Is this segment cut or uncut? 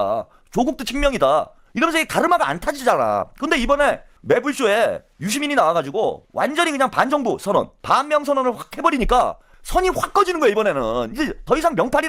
uncut